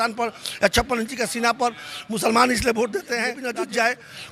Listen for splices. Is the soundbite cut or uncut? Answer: cut